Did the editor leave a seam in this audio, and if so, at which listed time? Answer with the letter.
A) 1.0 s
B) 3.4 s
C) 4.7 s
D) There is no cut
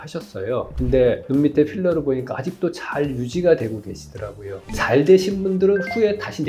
C